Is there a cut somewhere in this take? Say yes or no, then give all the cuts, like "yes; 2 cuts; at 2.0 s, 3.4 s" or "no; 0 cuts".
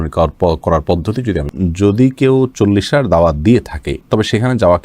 yes; 1 cut; at 1.5 s